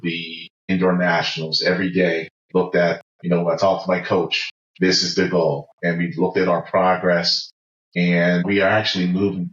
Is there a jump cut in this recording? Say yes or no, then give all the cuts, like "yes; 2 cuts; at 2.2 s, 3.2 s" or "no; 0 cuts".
yes; 3 cuts; at 0.7 s, 3.1 s, 8.4 s